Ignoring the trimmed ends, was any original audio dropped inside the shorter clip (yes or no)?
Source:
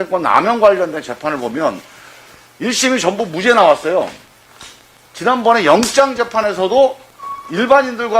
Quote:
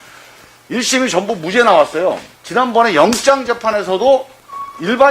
yes